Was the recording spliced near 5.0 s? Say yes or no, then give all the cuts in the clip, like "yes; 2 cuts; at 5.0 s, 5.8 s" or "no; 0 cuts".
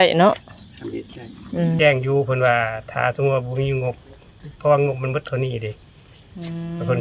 no; 1 cut; at 1.8 s